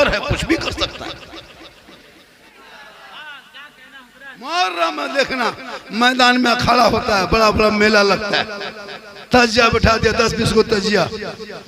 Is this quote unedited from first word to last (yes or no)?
no